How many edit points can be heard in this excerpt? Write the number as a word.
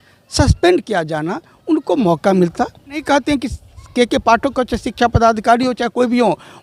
one